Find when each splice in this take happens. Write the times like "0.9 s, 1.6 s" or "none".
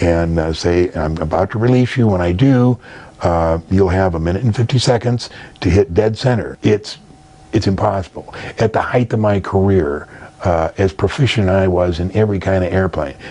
6.5 s